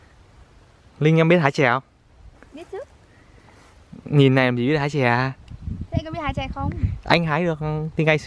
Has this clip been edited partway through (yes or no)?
no